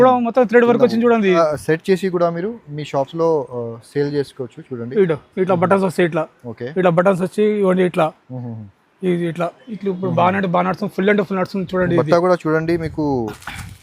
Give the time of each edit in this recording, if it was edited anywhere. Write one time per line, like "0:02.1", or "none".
0:01.4